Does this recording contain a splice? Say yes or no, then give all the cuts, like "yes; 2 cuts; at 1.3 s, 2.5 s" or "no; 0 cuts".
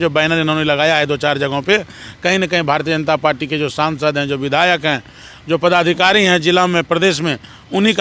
no; 0 cuts